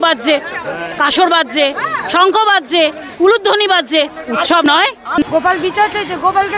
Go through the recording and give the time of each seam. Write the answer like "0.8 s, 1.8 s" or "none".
4.7 s